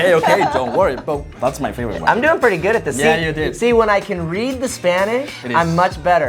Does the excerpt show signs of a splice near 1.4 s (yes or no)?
yes